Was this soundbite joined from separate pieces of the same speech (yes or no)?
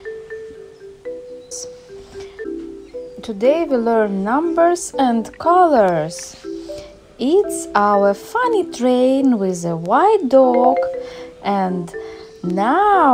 yes